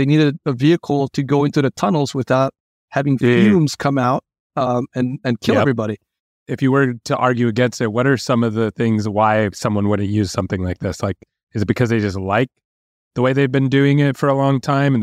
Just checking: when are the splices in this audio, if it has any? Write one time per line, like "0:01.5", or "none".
0:06.5